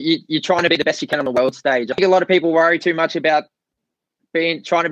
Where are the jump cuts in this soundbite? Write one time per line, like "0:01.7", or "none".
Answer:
0:01.9